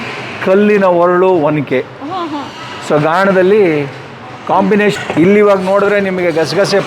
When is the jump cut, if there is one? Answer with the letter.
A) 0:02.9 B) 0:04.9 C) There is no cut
B